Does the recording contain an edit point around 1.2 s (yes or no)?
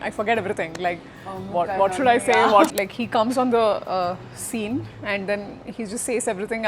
no